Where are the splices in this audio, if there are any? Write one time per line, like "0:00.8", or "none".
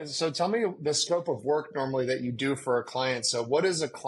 none